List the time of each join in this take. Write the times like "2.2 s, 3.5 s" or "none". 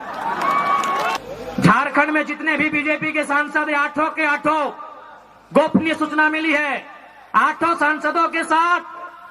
1.2 s